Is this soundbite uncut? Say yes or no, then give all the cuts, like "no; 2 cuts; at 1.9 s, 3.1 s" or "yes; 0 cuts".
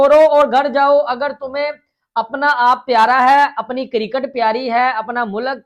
yes; 0 cuts